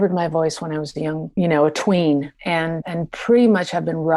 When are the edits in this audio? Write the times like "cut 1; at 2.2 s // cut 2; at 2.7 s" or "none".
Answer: cut 1; at 1.2 s // cut 2; at 2.7 s